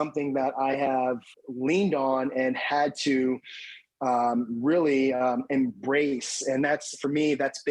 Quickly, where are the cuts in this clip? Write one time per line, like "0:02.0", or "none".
0:01.3

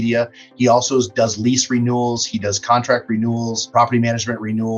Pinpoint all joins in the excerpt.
0:03.6

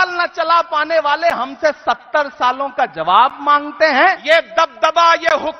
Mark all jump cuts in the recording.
0:04.2

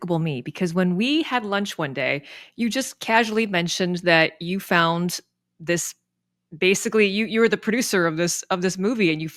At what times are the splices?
none

